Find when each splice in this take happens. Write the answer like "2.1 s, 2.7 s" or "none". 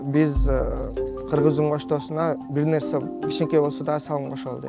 none